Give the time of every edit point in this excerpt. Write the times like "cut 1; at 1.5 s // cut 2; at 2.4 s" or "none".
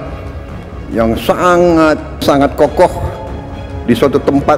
cut 1; at 2.2 s